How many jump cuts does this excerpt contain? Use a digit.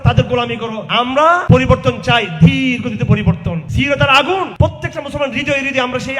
3